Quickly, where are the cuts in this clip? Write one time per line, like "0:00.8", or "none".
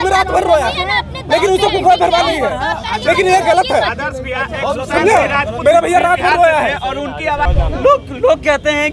0:07.4